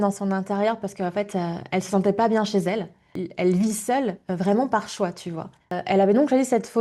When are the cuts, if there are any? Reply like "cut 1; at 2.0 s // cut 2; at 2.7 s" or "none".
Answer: cut 1; at 3.2 s // cut 2; at 5.7 s